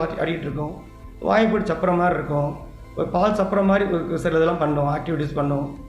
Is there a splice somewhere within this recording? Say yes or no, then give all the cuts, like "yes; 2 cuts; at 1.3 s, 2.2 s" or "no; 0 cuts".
no; 0 cuts